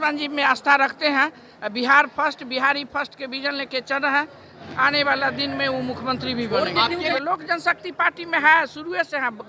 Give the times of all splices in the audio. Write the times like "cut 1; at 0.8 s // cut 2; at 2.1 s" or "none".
cut 1; at 4.6 s // cut 2; at 7.1 s

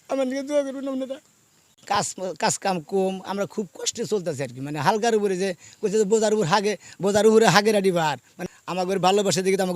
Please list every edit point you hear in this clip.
cut 1; at 1.7 s // cut 2; at 8.4 s

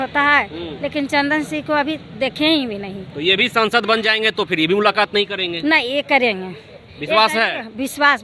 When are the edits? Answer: none

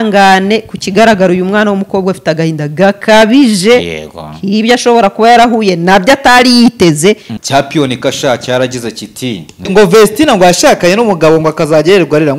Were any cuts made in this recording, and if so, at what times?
cut 1; at 7.3 s // cut 2; at 9.7 s

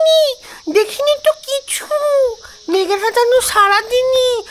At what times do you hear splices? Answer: none

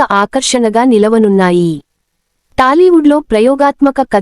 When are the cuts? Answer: cut 1; at 2.4 s

